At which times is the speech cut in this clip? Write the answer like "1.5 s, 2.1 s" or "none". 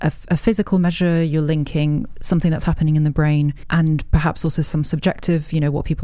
3.6 s

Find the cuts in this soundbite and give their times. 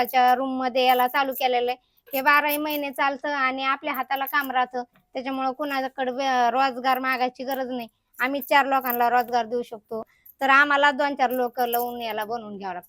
10.1 s

